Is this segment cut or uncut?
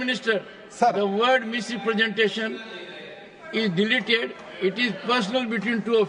uncut